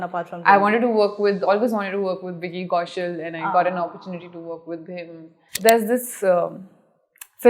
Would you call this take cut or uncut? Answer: cut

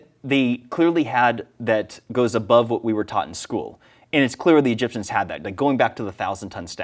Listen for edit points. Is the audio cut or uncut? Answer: uncut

